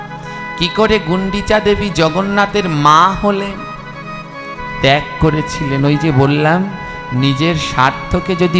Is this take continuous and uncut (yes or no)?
yes